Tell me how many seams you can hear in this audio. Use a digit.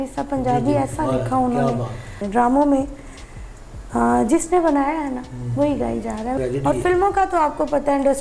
2